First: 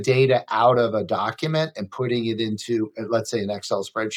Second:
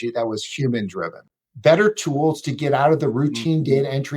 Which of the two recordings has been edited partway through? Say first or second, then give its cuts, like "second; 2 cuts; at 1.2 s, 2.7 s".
second; 1 cut; at 1.2 s